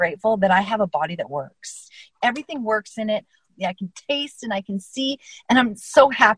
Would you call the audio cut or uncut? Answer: cut